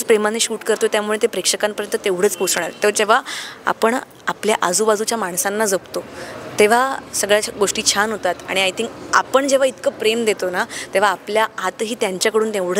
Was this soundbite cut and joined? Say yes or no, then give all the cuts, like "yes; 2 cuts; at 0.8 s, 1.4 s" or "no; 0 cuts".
no; 0 cuts